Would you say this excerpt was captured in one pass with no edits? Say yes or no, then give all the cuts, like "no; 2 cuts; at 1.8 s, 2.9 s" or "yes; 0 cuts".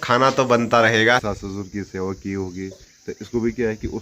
no; 1 cut; at 1.2 s